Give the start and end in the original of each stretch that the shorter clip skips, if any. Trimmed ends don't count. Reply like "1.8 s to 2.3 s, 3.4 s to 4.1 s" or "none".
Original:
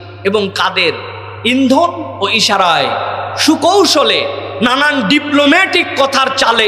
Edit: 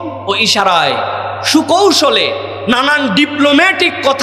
none